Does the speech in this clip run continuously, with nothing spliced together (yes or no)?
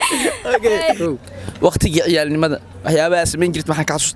no